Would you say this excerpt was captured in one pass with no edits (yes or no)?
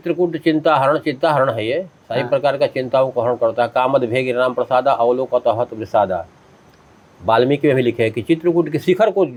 yes